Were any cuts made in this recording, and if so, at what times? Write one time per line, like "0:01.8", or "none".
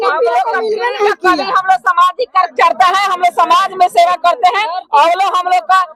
none